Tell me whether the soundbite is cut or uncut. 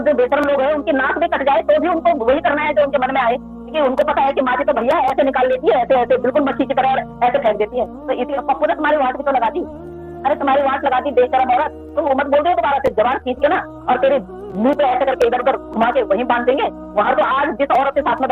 cut